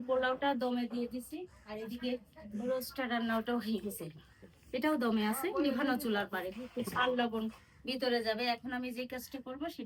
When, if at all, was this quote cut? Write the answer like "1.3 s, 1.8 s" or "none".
none